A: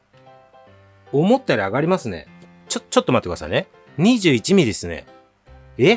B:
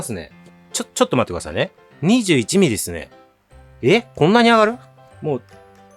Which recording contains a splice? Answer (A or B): B